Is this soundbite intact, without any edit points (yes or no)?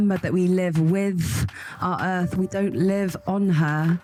yes